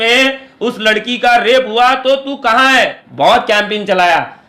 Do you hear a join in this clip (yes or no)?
yes